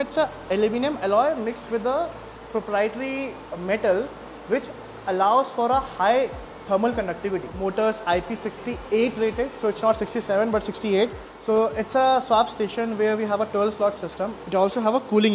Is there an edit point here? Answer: yes; 3 cuts; at 7.5 s, 11.3 s, 14.4 s

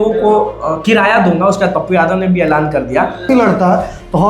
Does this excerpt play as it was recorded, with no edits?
no; 1 cut; at 3.3 s

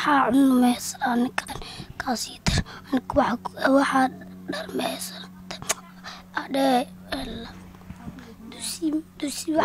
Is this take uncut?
no; 1 cut; at 1.5 s

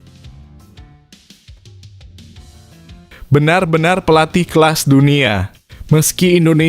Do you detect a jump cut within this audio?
yes; 1 cut; at 3.2 s

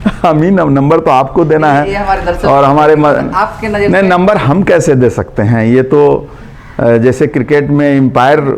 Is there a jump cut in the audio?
no; 0 cuts

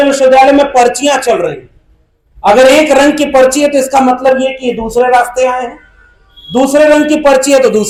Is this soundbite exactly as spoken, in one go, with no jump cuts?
yes; 0 cuts

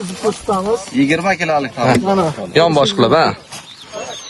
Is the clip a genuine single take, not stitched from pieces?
yes; 0 cuts

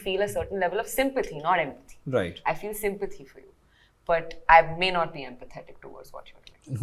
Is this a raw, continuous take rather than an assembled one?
yes; 0 cuts

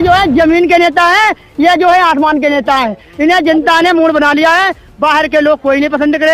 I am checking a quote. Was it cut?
no; 0 cuts

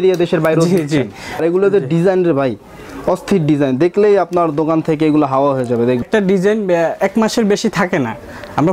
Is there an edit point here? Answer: yes; 2 cuts; at 1.4 s, 6.0 s

